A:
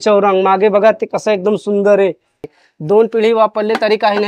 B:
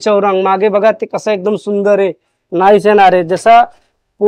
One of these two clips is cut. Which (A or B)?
A